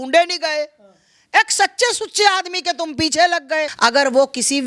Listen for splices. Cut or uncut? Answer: cut